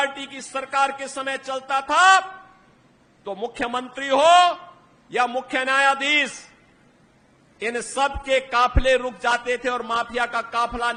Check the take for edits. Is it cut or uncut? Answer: uncut